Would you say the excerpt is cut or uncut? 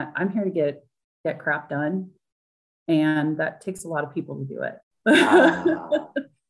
cut